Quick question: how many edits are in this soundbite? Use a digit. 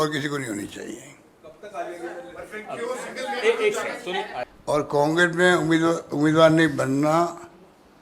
1